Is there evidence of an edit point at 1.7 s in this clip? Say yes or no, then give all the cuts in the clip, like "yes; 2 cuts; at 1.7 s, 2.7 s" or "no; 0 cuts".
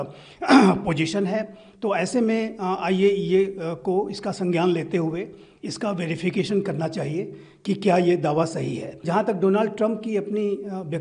no; 1 cut; at 9.0 s